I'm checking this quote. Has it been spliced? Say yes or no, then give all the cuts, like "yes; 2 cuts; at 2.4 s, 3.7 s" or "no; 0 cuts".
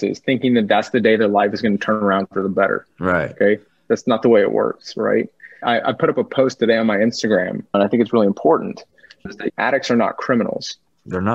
yes; 1 cut; at 5.6 s